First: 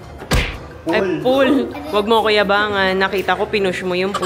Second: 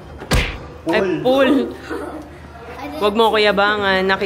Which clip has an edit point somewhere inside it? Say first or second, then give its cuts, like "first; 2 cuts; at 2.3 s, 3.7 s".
first; 1 cut; at 1.8 s